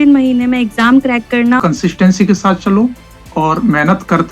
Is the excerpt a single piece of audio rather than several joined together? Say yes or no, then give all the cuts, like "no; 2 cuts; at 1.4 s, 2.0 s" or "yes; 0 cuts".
no; 1 cut; at 1.6 s